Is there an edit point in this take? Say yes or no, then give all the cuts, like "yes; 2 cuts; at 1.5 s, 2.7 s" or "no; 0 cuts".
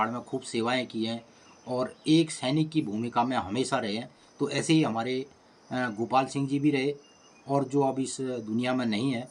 no; 0 cuts